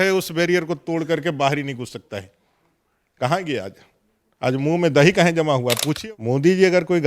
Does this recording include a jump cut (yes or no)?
yes